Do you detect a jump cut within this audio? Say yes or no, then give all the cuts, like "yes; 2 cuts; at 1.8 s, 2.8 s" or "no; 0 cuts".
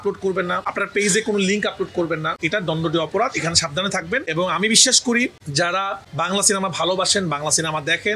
no; 0 cuts